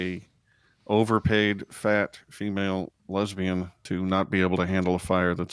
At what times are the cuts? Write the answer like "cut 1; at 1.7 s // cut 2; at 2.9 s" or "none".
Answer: cut 1; at 3.8 s